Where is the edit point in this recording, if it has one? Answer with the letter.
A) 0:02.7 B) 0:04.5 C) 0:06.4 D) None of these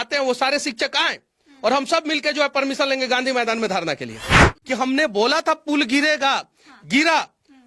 B